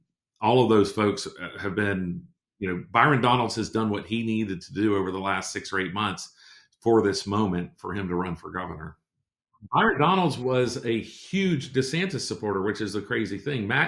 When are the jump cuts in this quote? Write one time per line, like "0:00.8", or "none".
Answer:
0:09.0